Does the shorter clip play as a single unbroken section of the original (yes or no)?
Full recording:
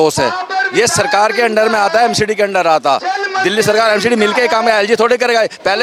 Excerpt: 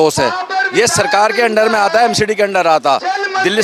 yes